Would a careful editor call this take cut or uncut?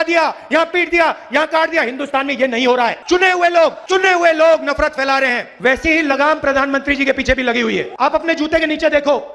cut